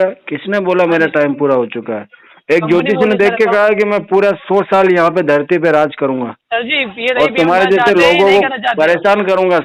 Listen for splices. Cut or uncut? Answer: uncut